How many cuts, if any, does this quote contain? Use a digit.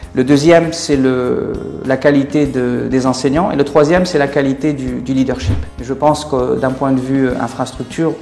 1